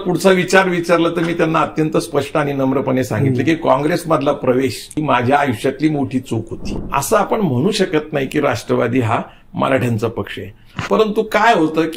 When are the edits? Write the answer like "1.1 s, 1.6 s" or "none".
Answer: 4.9 s, 6.6 s